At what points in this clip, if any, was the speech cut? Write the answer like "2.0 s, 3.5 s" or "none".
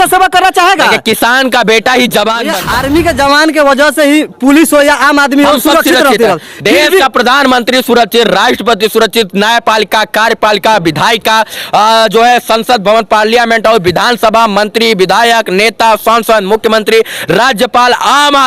2.5 s